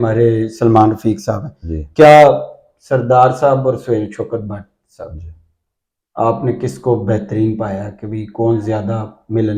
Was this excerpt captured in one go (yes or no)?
yes